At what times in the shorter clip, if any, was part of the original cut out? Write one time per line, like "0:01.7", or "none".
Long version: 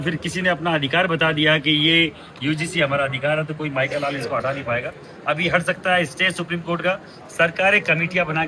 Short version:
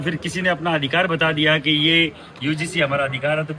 none